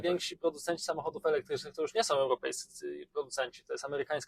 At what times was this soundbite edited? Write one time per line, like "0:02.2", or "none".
none